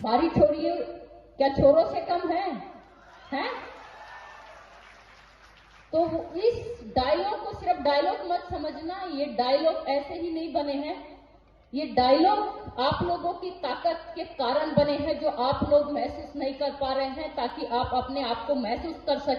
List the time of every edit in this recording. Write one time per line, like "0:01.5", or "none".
none

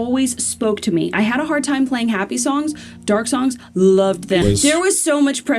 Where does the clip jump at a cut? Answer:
0:04.4

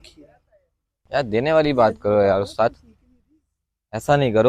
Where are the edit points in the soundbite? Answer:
0:00.9

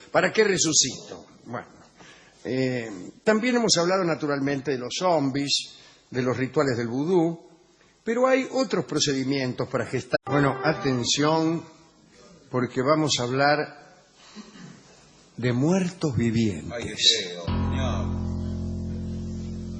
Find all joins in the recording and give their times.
none

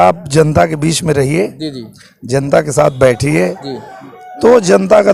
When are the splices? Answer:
none

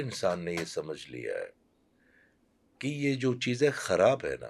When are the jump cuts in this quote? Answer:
none

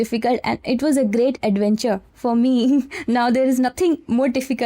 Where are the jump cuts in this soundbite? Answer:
0:02.1

